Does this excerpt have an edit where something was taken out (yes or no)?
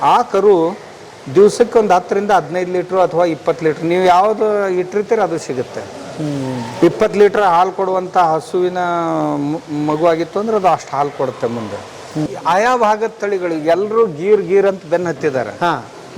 yes